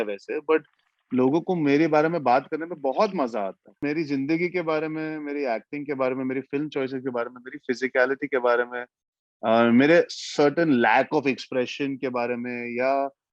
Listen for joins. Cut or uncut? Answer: cut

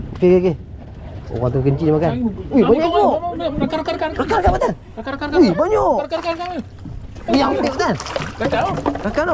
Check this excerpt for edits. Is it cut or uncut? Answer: uncut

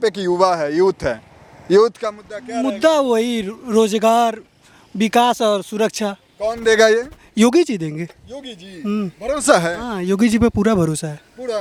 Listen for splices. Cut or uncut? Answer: uncut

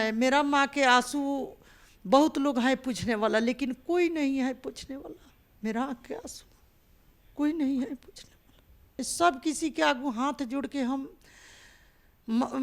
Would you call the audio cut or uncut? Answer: cut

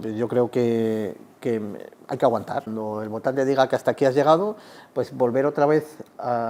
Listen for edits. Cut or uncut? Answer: cut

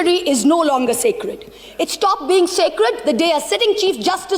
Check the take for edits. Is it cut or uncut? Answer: uncut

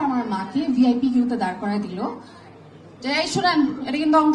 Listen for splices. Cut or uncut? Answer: uncut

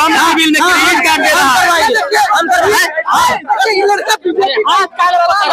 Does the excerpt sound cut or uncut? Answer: uncut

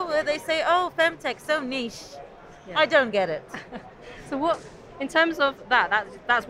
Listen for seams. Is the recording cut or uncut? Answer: uncut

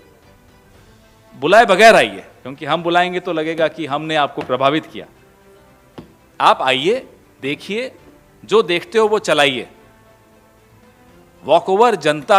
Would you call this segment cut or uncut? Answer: uncut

